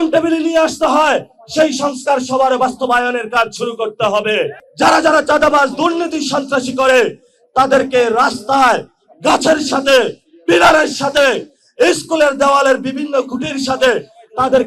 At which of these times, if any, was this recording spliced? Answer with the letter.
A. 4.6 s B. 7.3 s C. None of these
A